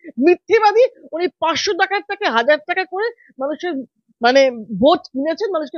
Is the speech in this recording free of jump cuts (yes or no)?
yes